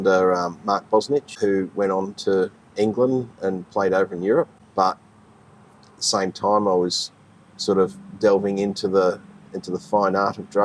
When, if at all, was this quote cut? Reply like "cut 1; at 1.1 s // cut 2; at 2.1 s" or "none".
cut 1; at 1.3 s // cut 2; at 4.5 s